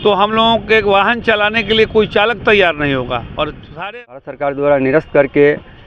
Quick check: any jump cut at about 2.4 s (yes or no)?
no